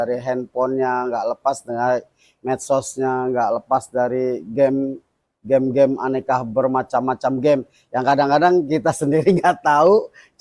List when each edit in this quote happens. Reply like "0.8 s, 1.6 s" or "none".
none